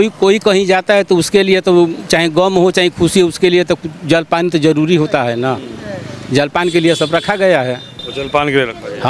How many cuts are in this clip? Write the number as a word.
one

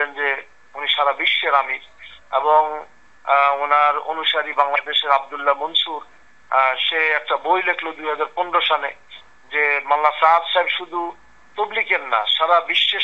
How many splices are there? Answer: zero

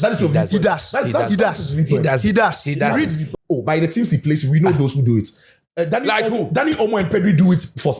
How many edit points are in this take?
one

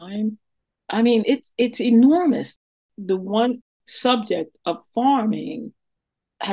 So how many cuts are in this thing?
two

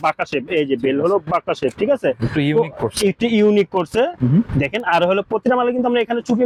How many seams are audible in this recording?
zero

